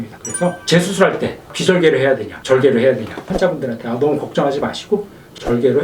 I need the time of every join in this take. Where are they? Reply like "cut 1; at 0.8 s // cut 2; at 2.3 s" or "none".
cut 1; at 3.3 s